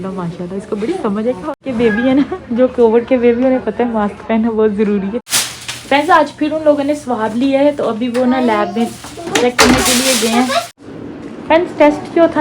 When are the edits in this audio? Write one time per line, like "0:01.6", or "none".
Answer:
0:01.6
0:05.2
0:10.7

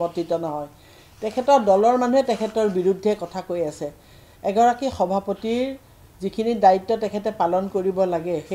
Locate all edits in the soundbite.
none

